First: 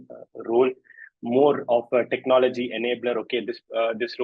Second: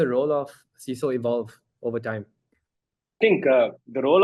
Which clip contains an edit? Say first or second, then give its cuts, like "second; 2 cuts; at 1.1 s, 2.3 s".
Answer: second; 1 cut; at 3.2 s